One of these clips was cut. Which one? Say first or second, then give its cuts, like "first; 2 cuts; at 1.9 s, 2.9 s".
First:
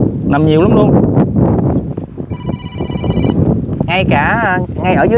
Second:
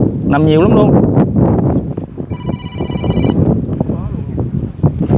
first; 1 cut; at 3.8 s